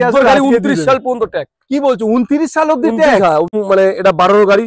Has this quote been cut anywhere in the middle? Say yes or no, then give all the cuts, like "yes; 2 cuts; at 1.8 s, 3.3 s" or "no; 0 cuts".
yes; 1 cut; at 3.6 s